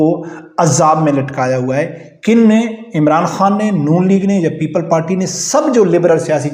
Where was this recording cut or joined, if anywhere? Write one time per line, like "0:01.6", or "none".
none